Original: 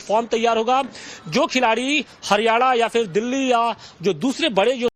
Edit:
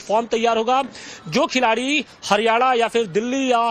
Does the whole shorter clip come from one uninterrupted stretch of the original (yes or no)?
yes